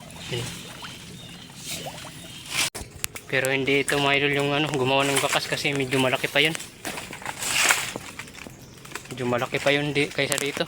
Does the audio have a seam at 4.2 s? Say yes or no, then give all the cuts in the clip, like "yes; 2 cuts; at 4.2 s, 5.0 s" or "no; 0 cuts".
no; 1 cut; at 2.7 s